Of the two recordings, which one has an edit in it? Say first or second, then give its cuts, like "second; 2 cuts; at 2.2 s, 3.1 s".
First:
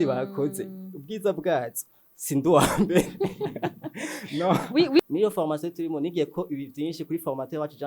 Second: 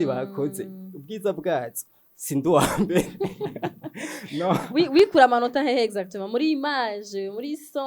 first; 1 cut; at 5.0 s